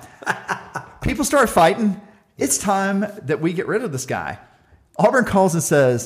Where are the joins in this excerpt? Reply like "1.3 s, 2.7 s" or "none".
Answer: none